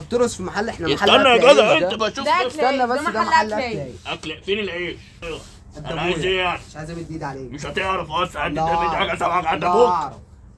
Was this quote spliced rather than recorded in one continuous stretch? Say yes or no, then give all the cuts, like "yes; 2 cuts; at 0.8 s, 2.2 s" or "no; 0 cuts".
no; 0 cuts